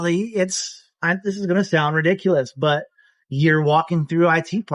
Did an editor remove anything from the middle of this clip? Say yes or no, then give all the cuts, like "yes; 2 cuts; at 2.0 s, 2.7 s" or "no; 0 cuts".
no; 0 cuts